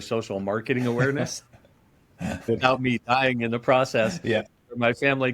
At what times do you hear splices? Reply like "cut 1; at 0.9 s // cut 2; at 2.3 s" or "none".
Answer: cut 1; at 2.5 s // cut 2; at 4.5 s